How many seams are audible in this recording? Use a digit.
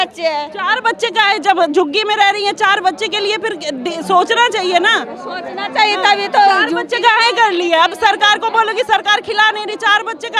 0